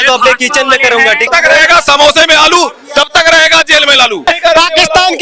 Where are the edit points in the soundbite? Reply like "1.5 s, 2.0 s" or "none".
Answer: 1.3 s, 4.3 s